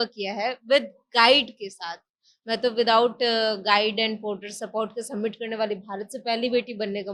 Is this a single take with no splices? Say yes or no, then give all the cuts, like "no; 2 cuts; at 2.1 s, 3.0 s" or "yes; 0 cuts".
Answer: yes; 0 cuts